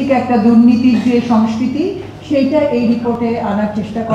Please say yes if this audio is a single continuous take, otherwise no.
yes